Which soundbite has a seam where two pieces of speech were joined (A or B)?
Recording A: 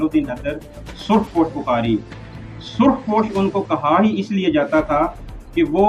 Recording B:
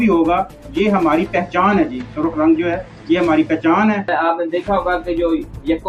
B